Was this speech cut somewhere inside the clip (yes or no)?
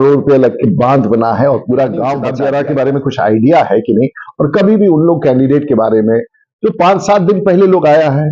yes